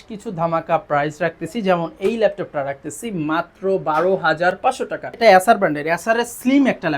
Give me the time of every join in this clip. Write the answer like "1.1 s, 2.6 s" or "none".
5.2 s